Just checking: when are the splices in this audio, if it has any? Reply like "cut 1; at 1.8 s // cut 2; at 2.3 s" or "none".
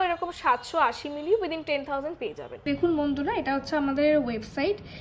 cut 1; at 2.5 s